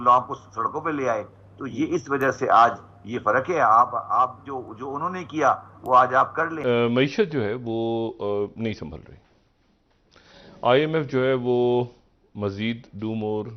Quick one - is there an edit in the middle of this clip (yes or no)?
yes